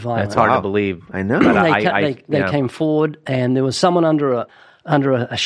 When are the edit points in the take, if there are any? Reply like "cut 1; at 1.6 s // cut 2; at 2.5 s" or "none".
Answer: cut 1; at 4.5 s